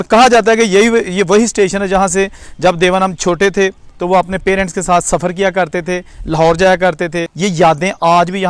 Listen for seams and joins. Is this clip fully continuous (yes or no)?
yes